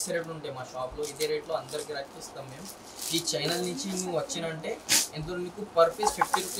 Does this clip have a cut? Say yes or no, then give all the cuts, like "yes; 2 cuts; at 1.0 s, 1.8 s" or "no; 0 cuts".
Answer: no; 0 cuts